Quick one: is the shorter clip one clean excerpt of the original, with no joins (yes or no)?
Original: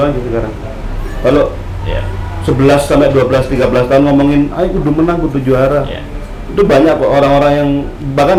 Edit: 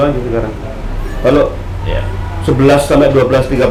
yes